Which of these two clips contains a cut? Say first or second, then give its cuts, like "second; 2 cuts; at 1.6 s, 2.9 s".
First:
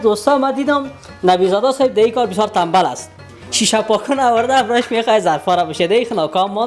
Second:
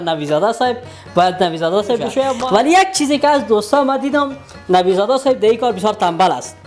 second; 1 cut; at 2.4 s